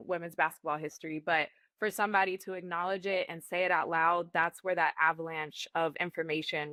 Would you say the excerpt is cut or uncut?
uncut